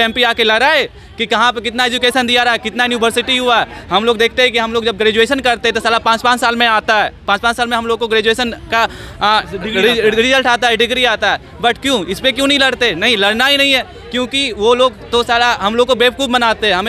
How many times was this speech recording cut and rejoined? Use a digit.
0